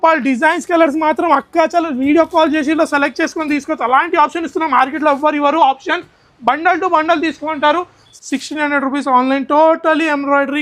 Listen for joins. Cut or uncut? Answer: cut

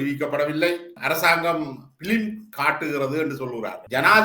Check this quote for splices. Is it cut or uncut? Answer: uncut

